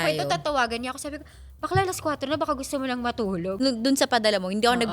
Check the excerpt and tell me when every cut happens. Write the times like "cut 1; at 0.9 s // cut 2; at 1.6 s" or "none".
cut 1; at 3.5 s